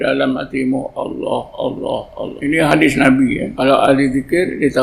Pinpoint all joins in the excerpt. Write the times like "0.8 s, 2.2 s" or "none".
2.4 s, 3.5 s